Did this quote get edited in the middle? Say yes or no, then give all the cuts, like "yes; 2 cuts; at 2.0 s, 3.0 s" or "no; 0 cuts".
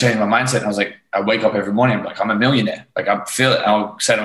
no; 0 cuts